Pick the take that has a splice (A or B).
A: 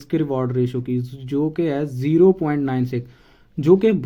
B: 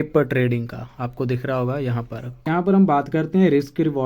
B